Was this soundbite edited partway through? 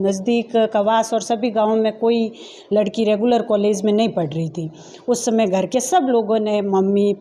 no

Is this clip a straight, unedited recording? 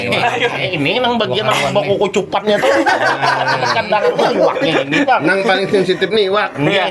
yes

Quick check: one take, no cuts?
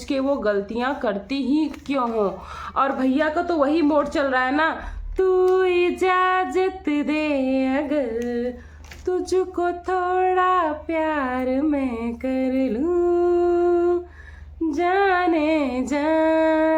yes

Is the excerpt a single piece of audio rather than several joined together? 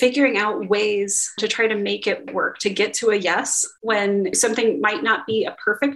no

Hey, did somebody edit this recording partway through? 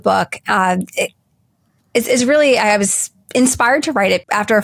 no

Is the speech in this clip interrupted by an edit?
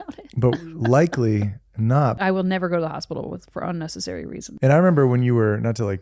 yes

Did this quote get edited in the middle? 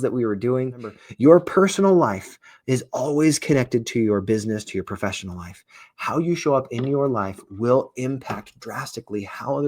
yes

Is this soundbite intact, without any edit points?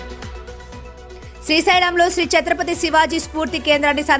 no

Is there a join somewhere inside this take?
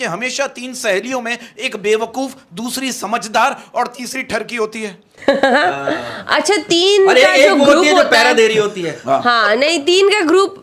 no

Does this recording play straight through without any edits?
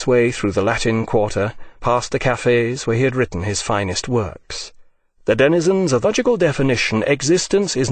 yes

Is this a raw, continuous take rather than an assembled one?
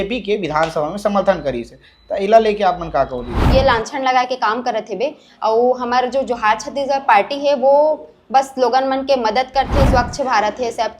no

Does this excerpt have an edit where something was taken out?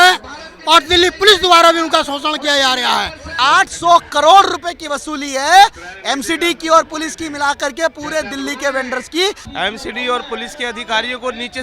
yes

